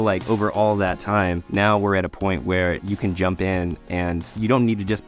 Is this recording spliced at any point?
no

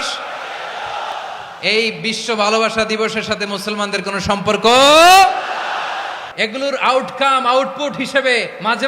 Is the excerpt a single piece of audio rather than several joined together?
no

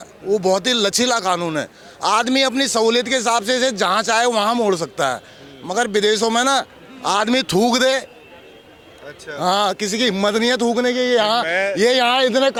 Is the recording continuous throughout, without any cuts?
yes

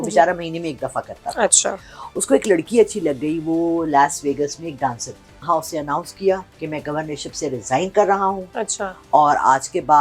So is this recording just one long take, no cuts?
no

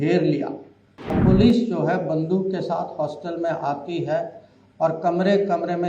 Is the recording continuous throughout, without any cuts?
no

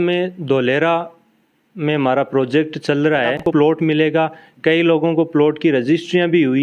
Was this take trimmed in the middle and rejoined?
yes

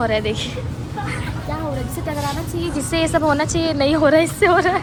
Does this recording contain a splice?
no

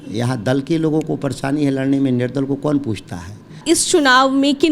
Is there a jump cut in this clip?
yes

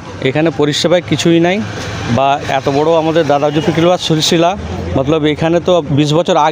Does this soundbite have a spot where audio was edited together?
no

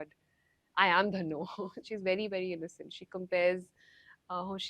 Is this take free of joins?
no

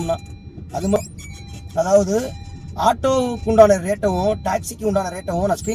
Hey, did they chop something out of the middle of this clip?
yes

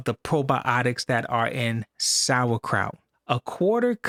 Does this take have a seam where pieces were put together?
no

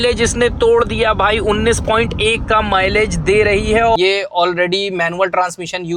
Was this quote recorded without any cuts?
no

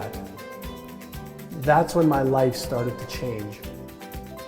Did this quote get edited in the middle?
yes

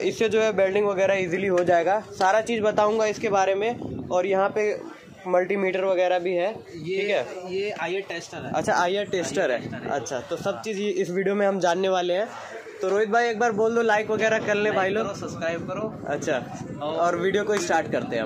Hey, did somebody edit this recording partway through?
no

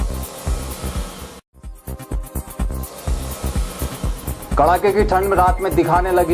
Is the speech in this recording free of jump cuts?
no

